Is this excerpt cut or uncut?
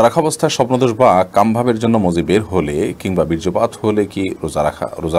uncut